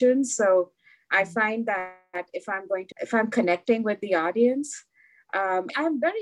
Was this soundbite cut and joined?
yes; 1 cut; at 2.9 s

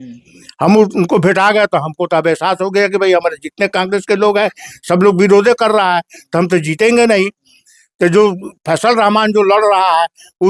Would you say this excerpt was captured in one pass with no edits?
yes; 0 cuts

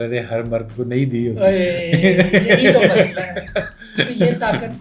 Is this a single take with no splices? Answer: yes; 0 cuts

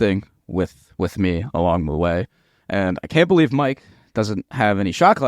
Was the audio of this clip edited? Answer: no; 0 cuts

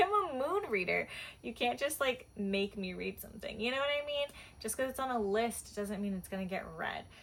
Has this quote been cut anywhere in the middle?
no; 0 cuts

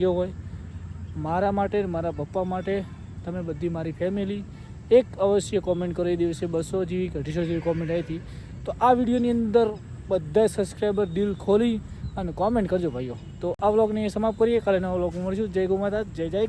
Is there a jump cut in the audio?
no; 0 cuts

